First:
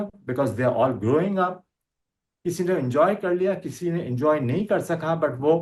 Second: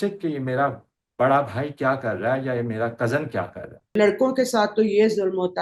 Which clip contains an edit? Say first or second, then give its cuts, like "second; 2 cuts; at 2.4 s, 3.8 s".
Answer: second; 1 cut; at 3.9 s